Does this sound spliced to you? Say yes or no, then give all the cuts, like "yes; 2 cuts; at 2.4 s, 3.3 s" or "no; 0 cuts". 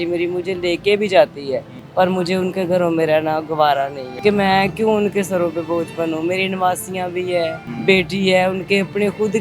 yes; 3 cuts; at 1.8 s, 4.0 s, 7.7 s